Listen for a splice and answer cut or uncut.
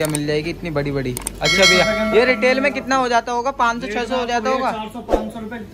uncut